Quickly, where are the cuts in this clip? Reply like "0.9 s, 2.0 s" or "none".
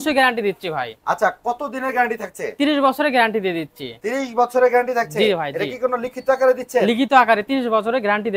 none